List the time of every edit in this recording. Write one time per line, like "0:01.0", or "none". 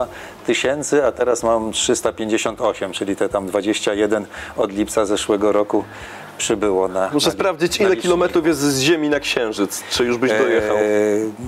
none